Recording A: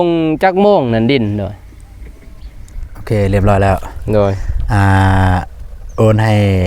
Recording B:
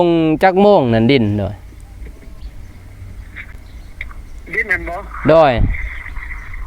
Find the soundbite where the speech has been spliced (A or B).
A